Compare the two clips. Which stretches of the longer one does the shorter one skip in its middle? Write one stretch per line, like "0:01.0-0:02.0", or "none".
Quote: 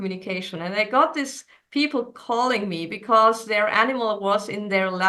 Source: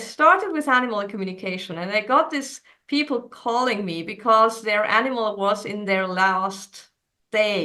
none